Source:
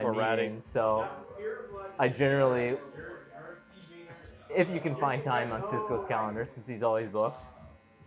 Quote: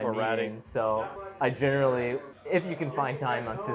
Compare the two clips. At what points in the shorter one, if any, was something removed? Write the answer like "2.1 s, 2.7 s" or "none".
1.2 s, 2.3 s